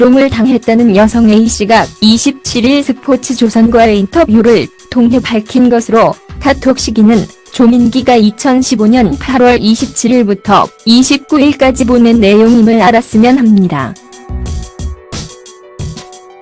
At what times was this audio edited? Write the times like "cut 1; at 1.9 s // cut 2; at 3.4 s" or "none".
none